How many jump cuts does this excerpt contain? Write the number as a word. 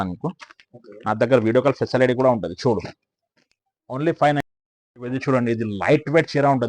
one